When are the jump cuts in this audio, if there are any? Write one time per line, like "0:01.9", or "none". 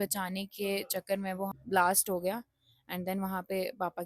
0:01.6